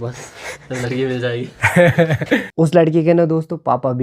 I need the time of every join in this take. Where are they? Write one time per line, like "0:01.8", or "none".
0:02.5